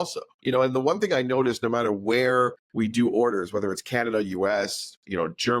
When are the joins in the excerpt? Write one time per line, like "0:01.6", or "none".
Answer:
0:02.6